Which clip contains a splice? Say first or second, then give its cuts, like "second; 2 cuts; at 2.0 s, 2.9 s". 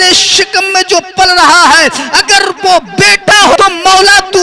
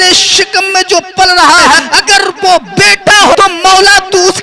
second; 1 cut; at 1.8 s